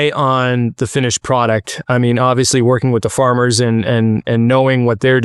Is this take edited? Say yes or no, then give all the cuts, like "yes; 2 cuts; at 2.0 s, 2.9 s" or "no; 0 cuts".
no; 0 cuts